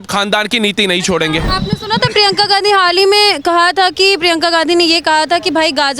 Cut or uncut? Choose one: cut